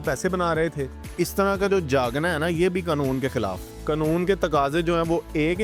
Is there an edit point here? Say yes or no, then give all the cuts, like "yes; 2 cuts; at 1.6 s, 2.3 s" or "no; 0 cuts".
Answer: yes; 2 cuts; at 1.0 s, 3.7 s